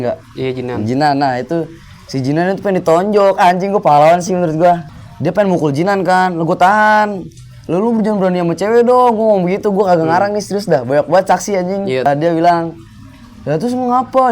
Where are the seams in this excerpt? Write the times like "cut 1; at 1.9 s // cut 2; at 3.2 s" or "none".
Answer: cut 1; at 4.9 s // cut 2; at 12.1 s